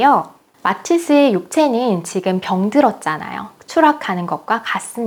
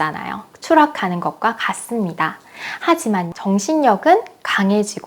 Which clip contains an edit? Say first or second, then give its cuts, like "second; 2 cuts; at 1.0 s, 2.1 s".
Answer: second; 1 cut; at 3.3 s